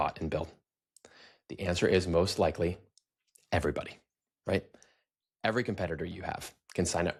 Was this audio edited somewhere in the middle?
no; 0 cuts

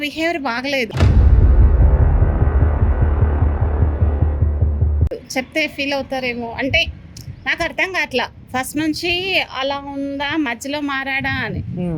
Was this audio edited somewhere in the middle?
no; 0 cuts

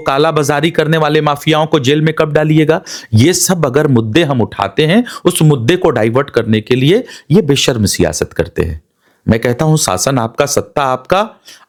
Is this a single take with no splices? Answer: yes; 0 cuts

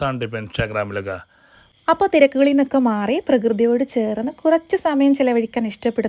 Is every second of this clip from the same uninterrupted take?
no; 1 cut; at 1.7 s

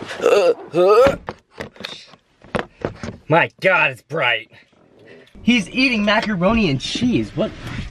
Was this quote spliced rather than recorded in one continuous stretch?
yes; 2 cuts; at 1.3 s, 5.3 s

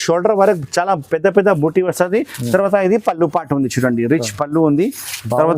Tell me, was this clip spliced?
yes; 1 cut; at 2.4 s

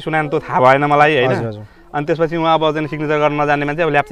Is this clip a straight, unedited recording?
yes; 0 cuts

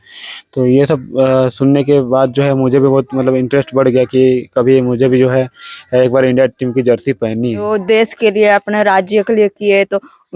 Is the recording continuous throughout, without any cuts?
no; 1 cut; at 7.7 s

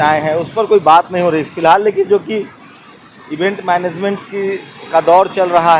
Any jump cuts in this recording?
no; 0 cuts

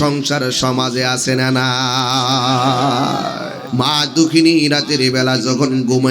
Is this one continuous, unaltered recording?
no; 1 cut; at 3.6 s

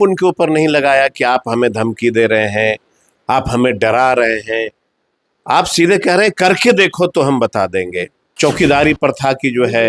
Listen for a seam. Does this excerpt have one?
yes; 1 cut; at 8.3 s

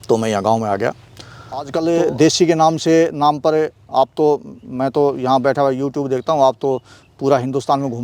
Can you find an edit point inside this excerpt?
yes; 1 cut; at 1.0 s

